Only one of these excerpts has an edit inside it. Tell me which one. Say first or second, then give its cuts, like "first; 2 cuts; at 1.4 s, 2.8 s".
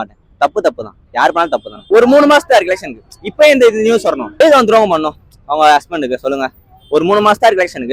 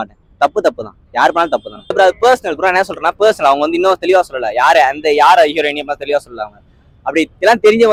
first; 2 cuts; at 1.7 s, 4.3 s